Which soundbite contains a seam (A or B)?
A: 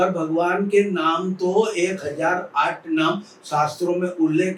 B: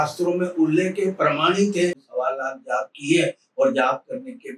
B